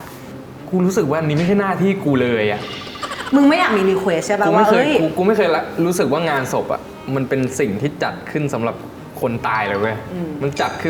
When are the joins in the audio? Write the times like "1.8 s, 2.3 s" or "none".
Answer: none

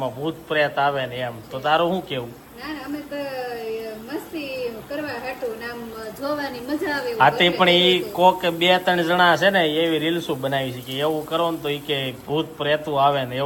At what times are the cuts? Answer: none

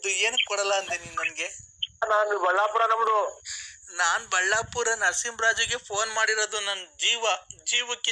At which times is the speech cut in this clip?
2.0 s

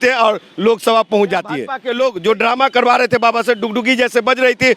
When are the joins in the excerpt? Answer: 1.8 s

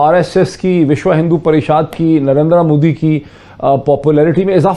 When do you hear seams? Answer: none

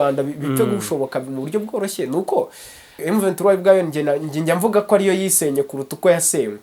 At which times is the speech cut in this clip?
3.0 s

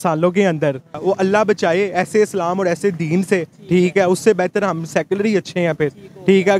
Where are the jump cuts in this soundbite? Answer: 1.0 s

